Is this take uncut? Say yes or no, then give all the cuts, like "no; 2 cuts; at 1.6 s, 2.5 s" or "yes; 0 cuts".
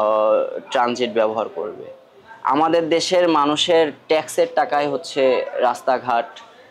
yes; 0 cuts